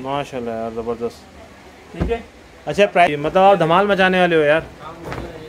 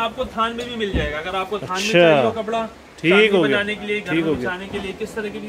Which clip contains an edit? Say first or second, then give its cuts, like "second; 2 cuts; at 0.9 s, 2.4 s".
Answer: first; 1 cut; at 3.1 s